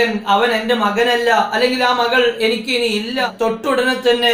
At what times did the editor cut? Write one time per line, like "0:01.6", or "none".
0:03.3